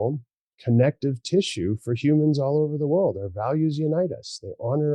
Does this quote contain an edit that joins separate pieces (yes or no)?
no